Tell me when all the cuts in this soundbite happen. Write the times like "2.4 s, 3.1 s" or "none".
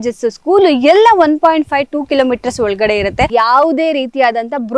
3.3 s